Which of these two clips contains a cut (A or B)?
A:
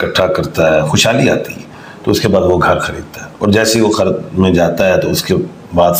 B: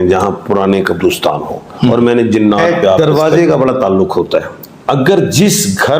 B